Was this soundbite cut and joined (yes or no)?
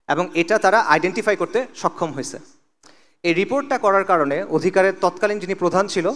no